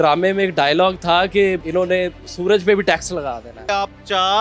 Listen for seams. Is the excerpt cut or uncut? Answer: cut